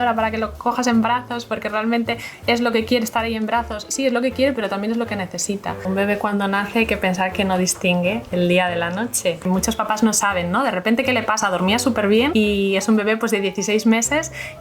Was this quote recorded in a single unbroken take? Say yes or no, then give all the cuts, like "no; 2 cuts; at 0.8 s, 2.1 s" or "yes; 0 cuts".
no; 3 cuts; at 5.8 s, 9.5 s, 12.3 s